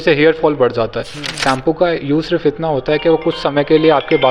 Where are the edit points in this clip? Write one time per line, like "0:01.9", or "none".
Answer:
0:01.2